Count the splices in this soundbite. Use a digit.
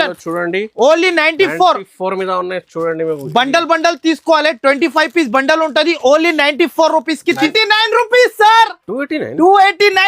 1